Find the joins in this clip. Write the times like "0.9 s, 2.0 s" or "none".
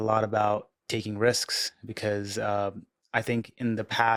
none